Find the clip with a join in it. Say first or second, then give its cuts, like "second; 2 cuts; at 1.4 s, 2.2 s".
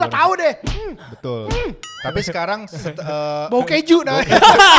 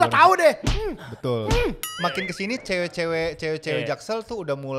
second; 1 cut; at 1.9 s